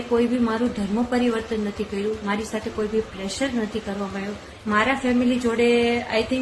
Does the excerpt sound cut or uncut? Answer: cut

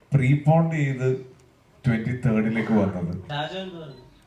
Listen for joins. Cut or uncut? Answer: cut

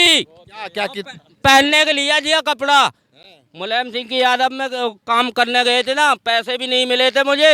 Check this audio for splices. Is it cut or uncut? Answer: uncut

